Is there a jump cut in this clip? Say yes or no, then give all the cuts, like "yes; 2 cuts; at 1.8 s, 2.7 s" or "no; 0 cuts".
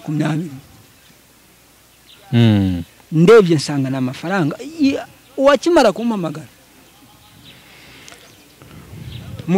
no; 0 cuts